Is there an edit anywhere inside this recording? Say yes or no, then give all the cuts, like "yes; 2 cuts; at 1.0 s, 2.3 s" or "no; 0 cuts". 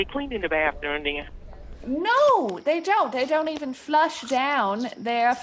no; 0 cuts